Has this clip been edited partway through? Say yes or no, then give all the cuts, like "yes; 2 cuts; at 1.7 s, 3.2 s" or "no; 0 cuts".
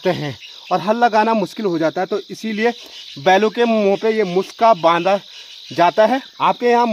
no; 0 cuts